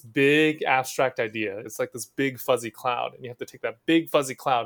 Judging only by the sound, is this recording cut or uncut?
cut